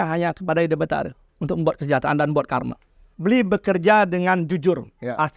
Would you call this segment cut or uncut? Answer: cut